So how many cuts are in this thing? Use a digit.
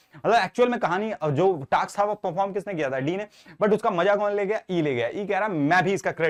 0